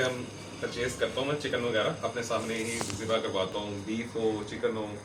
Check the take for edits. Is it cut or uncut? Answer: uncut